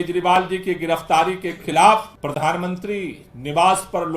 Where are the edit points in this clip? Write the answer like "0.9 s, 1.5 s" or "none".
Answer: 2.1 s